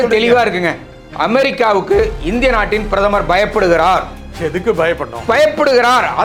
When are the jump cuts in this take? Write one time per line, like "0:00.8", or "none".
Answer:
none